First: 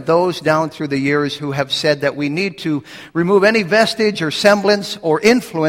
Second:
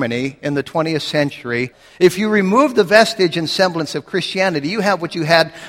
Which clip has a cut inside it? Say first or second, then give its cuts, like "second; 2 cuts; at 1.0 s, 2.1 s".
second; 1 cut; at 1.8 s